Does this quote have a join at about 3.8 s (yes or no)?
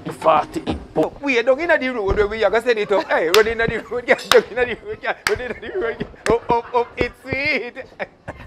no